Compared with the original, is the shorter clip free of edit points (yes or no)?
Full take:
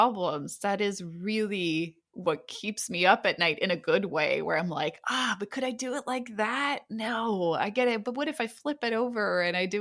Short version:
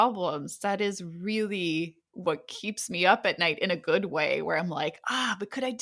yes